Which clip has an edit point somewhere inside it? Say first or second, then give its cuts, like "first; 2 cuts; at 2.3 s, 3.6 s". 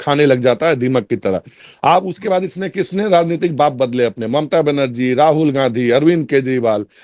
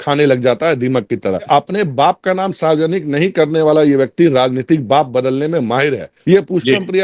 second; 2 cuts; at 1.5 s, 6.1 s